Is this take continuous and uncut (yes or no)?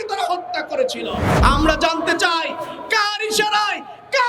no